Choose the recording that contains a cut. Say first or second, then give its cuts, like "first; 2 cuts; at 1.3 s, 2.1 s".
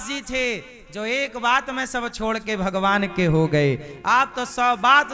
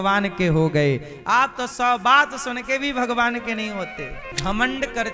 second; 1 cut; at 4.2 s